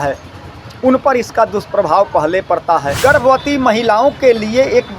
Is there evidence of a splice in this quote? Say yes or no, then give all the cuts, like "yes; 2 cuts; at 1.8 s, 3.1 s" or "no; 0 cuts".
yes; 1 cut; at 2.9 s